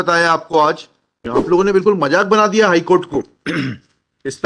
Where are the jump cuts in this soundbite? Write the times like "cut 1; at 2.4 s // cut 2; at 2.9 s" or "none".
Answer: cut 1; at 1.2 s